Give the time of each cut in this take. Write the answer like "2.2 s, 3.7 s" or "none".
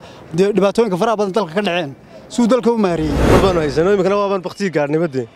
3.2 s